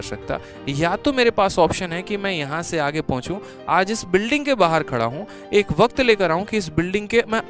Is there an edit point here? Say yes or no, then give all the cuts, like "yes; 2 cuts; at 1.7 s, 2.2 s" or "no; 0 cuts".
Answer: no; 0 cuts